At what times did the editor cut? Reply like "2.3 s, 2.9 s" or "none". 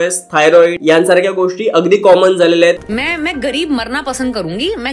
0.8 s, 2.8 s